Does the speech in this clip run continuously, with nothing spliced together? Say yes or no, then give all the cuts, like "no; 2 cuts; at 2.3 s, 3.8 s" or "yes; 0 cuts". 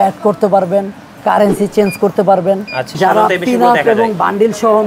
no; 1 cut; at 2.9 s